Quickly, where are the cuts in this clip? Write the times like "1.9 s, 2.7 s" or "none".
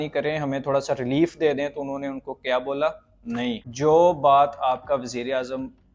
3.7 s